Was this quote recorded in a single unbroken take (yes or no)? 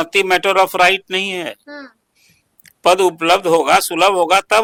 yes